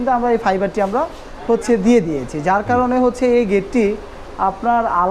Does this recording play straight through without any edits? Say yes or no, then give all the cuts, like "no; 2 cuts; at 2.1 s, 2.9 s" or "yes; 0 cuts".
yes; 0 cuts